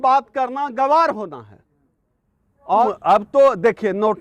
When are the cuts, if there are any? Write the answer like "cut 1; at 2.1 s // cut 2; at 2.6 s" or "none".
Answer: cut 1; at 2.9 s